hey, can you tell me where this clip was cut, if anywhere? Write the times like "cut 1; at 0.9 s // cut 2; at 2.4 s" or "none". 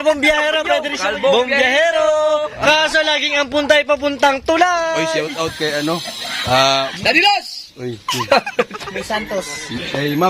cut 1; at 1.0 s // cut 2; at 5.2 s // cut 3; at 6.9 s